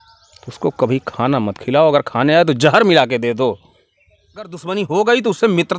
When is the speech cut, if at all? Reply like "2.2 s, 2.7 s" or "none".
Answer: 4.6 s